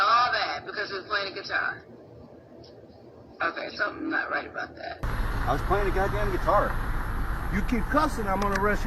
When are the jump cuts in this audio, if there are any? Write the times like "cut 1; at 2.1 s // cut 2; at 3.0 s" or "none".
cut 1; at 5.0 s